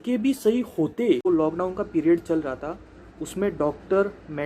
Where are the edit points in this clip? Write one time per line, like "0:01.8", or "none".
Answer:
0:01.3